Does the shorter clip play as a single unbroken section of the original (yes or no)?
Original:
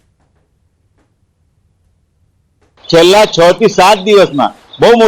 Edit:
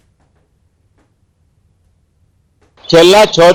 yes